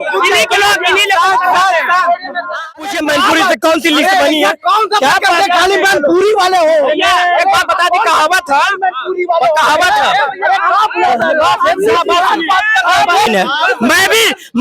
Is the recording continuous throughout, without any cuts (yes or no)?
no